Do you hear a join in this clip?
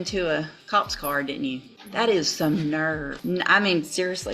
yes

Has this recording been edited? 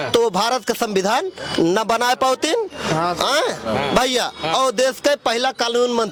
no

